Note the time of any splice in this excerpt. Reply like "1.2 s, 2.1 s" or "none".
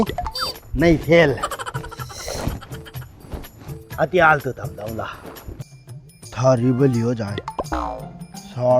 5.6 s